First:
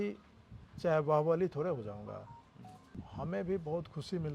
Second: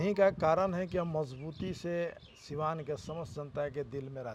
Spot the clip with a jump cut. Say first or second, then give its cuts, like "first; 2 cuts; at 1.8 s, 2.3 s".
first; 1 cut; at 3.0 s